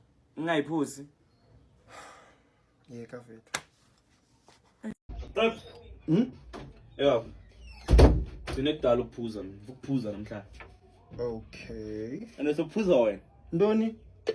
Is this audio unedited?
yes; 0 cuts

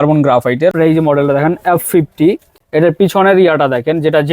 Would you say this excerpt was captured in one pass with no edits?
no; 2 cuts; at 0.7 s, 2.5 s

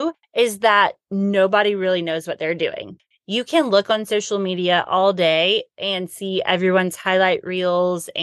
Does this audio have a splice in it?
yes; 1 cut; at 3.0 s

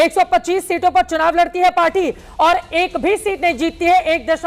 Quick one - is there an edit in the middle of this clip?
no; 0 cuts

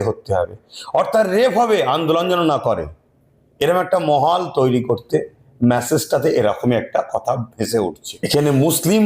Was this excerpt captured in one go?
no; 1 cut; at 8.1 s

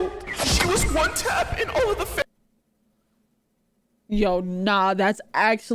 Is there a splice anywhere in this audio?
no; 0 cuts

